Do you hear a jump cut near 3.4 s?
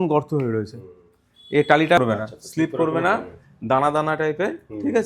no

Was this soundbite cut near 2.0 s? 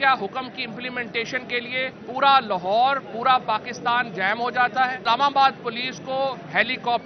yes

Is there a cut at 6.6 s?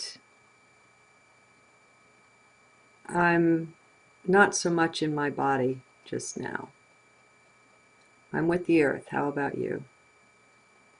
yes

